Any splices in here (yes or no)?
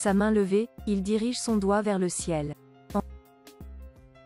yes